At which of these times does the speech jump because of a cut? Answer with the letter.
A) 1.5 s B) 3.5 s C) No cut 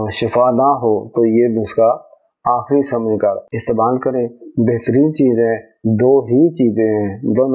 B